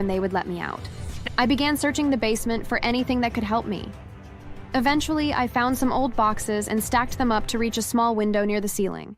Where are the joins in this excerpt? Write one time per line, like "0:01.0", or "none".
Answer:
0:01.3